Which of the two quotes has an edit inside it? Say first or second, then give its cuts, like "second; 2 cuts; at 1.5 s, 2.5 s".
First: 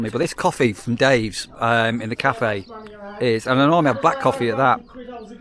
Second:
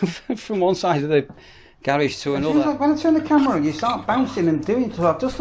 second; 1 cut; at 2.5 s